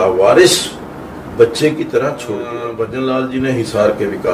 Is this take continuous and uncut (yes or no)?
no